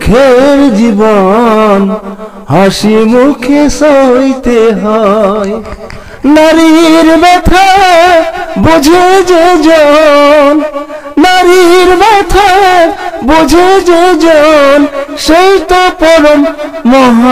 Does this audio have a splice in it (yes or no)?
no